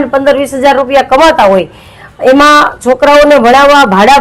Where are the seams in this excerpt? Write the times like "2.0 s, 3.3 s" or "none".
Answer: none